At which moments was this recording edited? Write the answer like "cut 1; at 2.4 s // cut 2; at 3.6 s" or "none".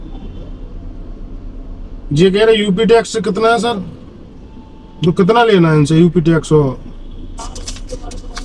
cut 1; at 7.4 s